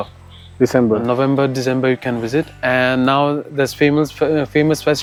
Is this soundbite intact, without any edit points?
yes; 0 cuts

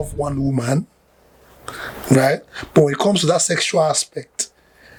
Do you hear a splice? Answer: no; 0 cuts

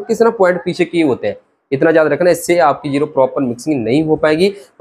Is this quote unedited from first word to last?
yes; 0 cuts

